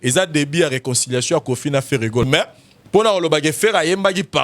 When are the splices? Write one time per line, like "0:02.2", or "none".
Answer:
0:02.2